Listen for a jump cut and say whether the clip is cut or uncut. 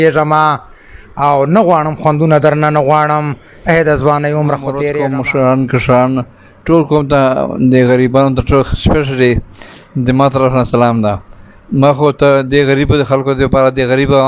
cut